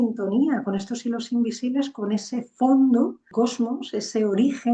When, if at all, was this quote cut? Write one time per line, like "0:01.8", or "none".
0:03.3